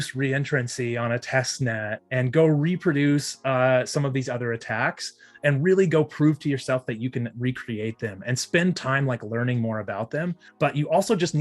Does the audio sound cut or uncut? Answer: cut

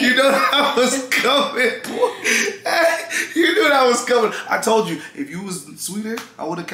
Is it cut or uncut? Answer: uncut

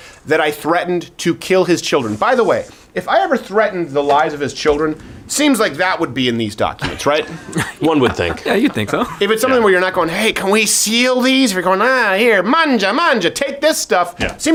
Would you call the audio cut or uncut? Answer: uncut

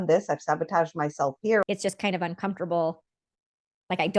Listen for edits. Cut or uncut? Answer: cut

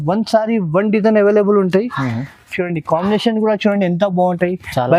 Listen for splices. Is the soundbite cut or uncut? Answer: uncut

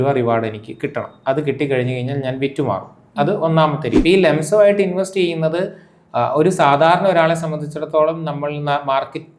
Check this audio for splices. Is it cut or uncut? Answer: cut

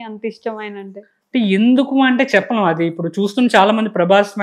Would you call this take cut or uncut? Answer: uncut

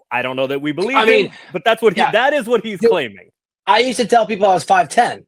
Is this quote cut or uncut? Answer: uncut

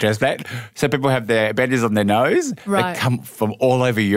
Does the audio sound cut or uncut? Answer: uncut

